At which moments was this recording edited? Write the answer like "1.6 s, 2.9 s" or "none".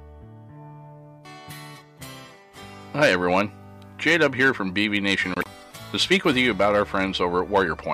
5.4 s

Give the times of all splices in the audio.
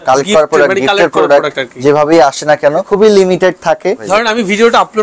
2.9 s, 4.0 s

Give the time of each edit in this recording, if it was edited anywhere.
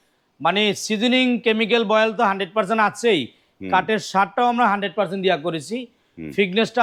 none

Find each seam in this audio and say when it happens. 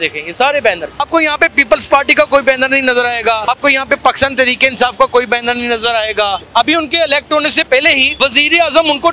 1.0 s, 3.5 s, 6.4 s, 8.1 s

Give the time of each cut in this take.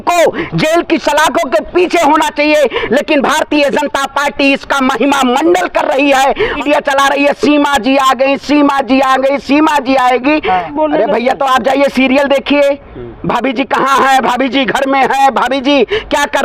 6.6 s, 10.7 s

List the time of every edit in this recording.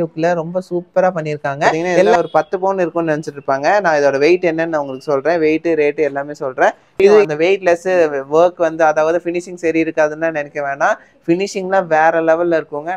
2.1 s, 7.2 s

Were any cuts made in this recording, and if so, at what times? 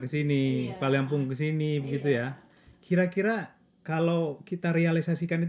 none

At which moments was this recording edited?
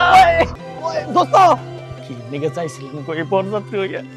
none

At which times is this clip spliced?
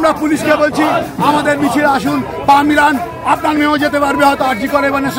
none

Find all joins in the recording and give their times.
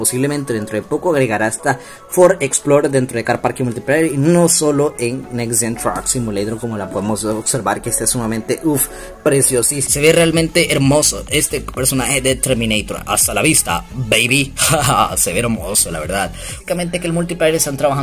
9.8 s, 16.6 s

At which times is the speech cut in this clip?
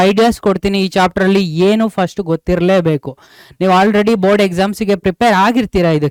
none

